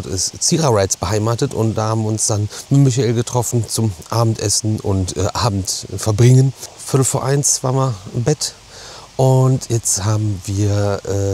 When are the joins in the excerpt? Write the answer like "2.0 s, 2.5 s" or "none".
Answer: none